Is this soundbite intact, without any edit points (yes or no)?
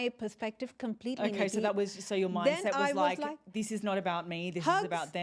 yes